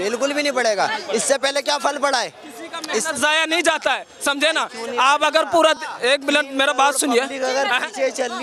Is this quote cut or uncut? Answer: uncut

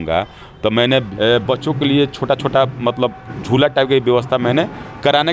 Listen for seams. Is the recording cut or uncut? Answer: cut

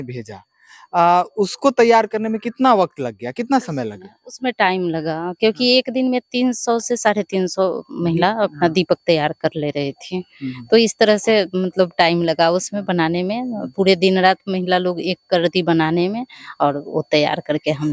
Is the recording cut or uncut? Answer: uncut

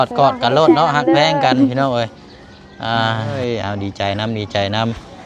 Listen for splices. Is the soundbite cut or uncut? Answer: cut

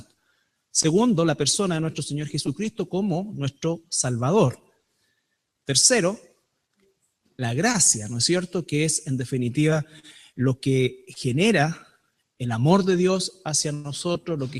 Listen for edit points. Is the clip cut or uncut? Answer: uncut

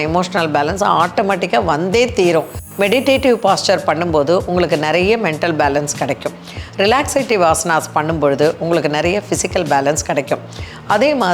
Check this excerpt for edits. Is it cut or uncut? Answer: cut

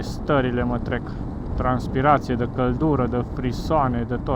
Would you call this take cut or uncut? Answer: uncut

